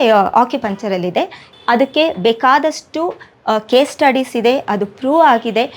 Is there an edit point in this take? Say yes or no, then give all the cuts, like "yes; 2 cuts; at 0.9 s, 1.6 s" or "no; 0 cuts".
yes; 1 cut; at 1.4 s